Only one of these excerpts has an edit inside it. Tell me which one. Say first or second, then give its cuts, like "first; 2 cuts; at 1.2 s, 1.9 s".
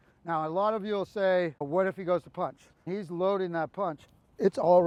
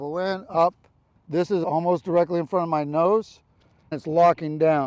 second; 2 cuts; at 1.1 s, 3.9 s